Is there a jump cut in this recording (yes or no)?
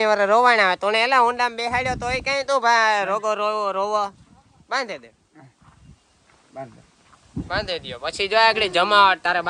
no